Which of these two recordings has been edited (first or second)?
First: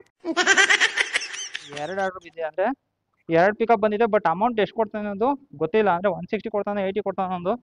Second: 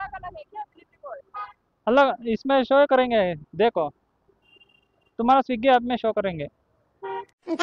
first